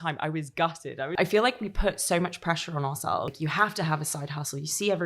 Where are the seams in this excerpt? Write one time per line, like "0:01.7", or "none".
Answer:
0:01.2
0:03.3